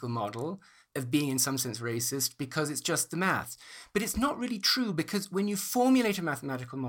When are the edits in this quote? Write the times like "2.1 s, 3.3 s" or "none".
none

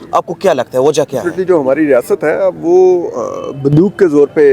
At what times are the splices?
1.3 s

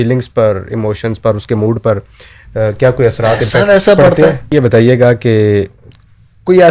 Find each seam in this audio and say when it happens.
4.5 s

